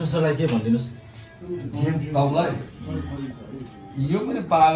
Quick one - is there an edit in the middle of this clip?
no; 0 cuts

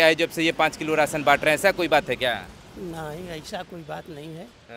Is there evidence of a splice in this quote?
no; 0 cuts

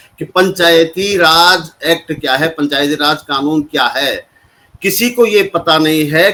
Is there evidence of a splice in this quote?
no; 0 cuts

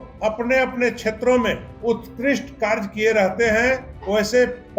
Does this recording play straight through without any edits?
no; 2 cuts; at 1.7 s, 3.9 s

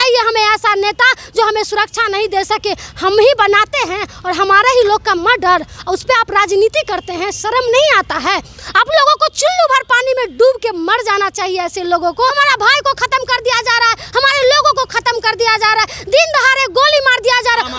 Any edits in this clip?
yes; 1 cut; at 12.3 s

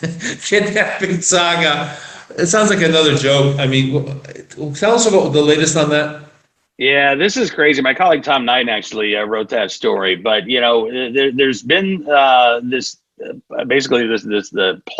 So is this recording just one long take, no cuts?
yes; 0 cuts

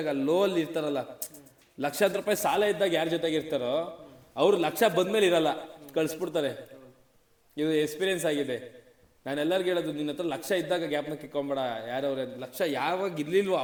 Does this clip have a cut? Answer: no; 0 cuts

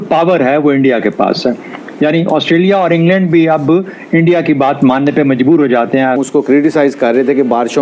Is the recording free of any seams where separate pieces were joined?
no; 1 cut; at 6.2 s

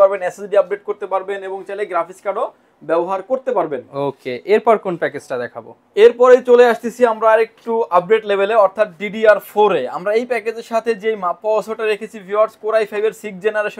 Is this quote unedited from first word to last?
yes; 0 cuts

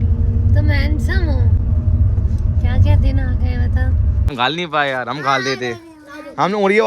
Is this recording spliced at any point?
yes; 2 cuts; at 1.6 s, 4.3 s

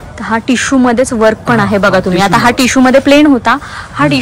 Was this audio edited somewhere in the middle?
no; 0 cuts

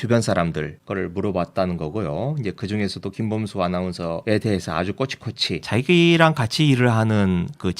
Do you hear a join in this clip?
yes; 2 cuts; at 4.2 s, 5.6 s

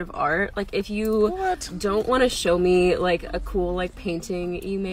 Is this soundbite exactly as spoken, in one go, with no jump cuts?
no; 1 cut; at 1.2 s

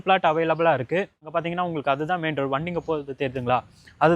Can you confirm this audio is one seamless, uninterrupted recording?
no; 1 cut; at 1.3 s

